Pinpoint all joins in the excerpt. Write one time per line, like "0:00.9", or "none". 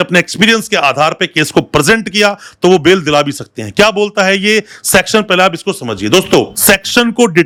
none